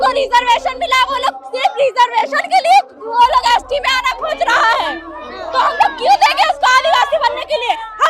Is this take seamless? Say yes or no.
yes